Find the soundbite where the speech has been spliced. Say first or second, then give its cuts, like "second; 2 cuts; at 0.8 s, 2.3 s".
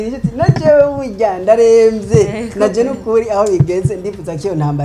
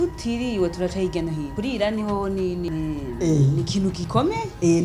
second; 3 cuts; at 1.5 s, 2.7 s, 4.0 s